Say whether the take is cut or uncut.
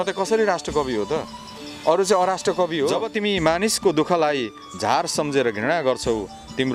cut